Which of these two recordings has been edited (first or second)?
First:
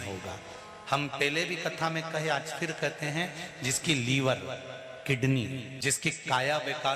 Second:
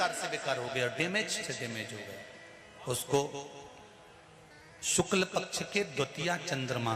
first